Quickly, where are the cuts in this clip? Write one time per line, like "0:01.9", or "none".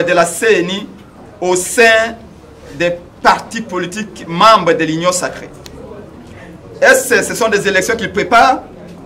none